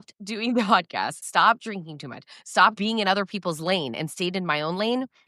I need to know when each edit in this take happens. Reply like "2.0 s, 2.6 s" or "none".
1.2 s, 2.8 s